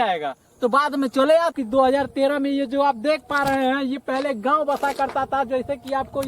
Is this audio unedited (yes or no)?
no